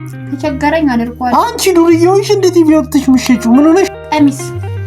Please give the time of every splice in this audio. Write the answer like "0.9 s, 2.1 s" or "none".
3.9 s